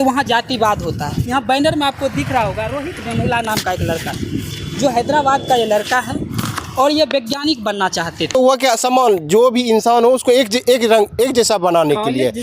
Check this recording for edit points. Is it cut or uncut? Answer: cut